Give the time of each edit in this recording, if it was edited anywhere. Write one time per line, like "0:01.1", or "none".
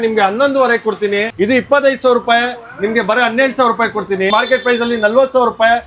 0:01.3
0:04.3